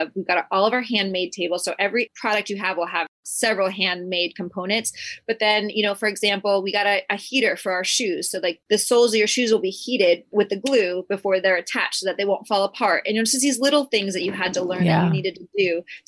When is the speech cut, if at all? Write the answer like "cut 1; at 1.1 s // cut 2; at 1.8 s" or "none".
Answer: cut 1; at 3.2 s // cut 2; at 8.6 s